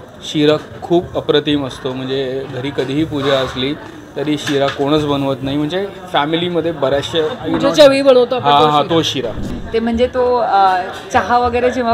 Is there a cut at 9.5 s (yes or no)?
yes